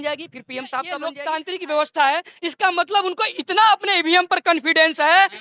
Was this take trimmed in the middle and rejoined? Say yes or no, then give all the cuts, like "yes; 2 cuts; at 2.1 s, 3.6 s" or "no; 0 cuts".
yes; 1 cut; at 1.1 s